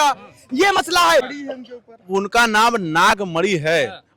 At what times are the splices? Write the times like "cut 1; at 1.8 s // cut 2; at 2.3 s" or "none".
cut 1; at 1.4 s